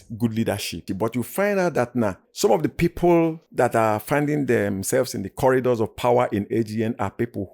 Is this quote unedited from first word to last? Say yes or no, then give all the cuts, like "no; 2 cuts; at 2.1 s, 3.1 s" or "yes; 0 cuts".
no; 3 cuts; at 0.9 s, 2.2 s, 3.4 s